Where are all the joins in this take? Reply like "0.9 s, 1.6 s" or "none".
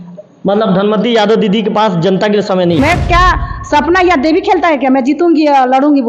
2.8 s